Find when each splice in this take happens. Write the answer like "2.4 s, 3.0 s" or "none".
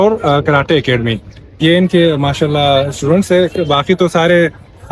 none